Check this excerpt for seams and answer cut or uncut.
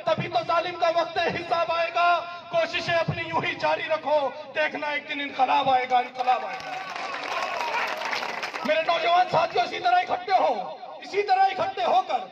uncut